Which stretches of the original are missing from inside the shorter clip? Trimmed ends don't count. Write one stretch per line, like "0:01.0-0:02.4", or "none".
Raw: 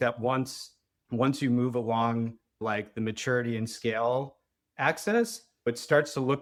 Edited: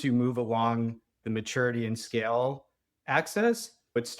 0:02.5-0:02.9

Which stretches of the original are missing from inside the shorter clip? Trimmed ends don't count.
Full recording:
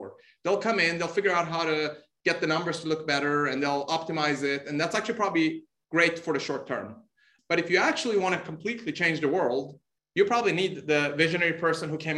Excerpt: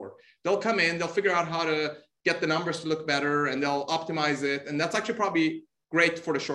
none

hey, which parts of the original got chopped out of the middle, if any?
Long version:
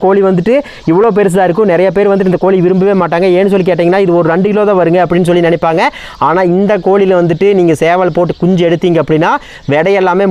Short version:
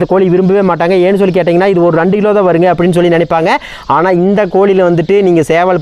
none

